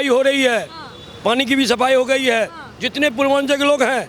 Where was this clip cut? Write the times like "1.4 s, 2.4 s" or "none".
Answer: none